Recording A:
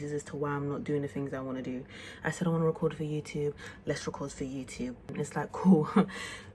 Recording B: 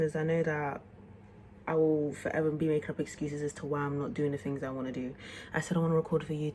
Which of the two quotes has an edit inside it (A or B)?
A